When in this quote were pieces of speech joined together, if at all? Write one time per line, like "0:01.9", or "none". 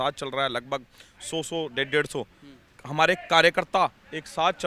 none